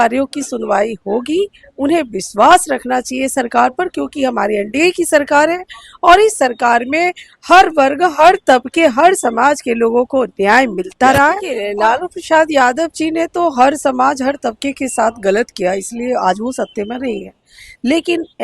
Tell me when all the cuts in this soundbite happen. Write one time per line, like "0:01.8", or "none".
0:11.5